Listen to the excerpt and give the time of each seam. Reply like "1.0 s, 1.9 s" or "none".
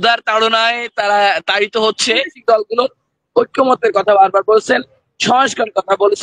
2.4 s